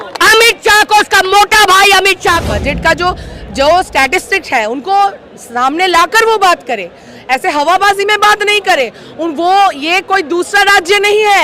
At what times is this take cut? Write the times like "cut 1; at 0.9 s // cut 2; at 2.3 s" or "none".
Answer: cut 1; at 2.5 s